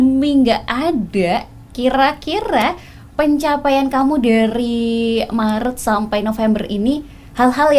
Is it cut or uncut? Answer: uncut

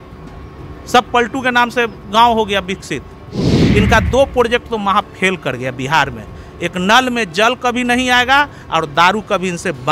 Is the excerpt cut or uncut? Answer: cut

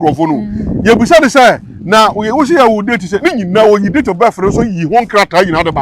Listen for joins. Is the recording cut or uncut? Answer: uncut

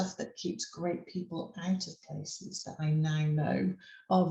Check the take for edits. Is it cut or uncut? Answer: cut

